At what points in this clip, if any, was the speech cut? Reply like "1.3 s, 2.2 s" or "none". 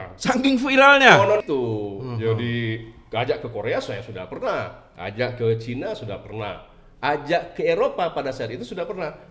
1.4 s